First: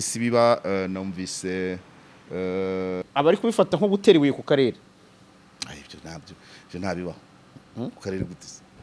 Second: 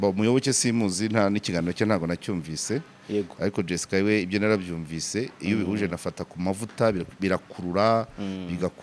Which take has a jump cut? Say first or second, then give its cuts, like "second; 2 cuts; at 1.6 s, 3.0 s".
first; 1 cut; at 3.0 s